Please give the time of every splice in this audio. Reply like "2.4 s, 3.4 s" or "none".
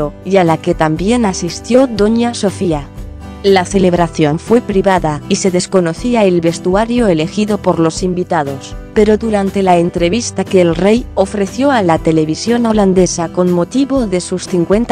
10.8 s